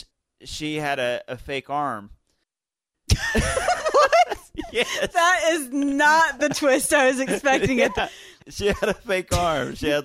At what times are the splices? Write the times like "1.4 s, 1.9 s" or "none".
8.3 s

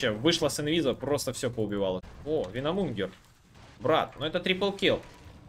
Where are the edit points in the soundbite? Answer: 2.1 s

